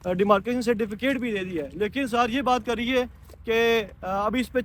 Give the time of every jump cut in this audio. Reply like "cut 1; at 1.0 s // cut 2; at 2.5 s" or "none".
none